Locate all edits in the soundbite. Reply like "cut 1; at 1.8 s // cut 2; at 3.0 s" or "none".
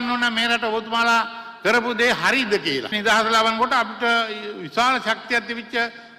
cut 1; at 3.0 s